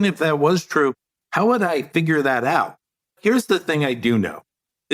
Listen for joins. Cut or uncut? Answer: cut